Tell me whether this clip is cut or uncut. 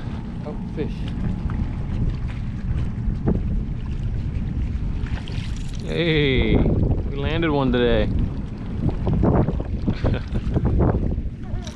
uncut